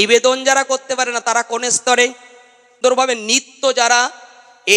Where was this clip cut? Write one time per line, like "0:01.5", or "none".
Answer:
0:02.8